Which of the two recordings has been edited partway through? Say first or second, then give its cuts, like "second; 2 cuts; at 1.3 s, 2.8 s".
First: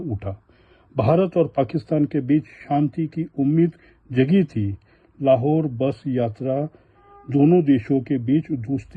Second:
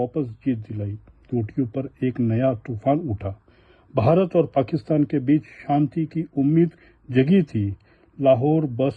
second; 1 cut; at 1.3 s